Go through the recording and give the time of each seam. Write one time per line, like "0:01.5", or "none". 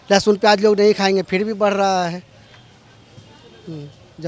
none